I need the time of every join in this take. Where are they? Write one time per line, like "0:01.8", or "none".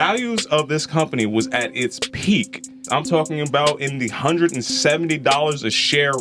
0:02.8